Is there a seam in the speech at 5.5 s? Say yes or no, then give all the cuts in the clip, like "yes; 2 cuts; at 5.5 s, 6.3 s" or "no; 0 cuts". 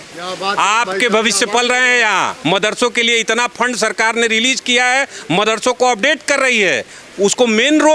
no; 1 cut; at 2.4 s